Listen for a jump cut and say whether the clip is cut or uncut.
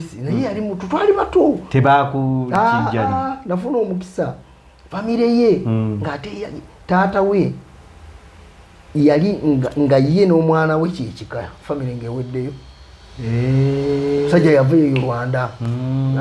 uncut